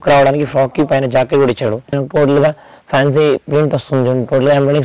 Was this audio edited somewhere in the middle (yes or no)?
yes